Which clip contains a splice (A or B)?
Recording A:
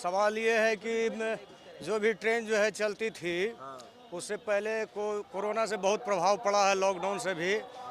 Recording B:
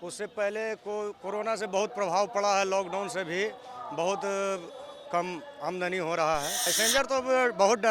B